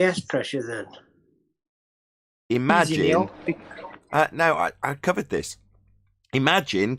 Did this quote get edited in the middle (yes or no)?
no